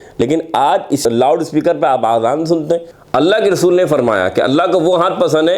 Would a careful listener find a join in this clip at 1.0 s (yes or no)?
yes